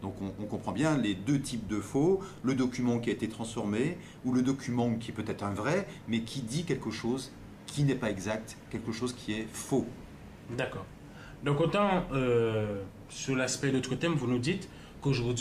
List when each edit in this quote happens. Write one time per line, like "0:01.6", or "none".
none